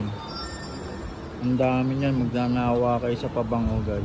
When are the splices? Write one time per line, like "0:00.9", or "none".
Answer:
none